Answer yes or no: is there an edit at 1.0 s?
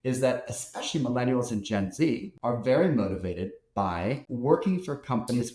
no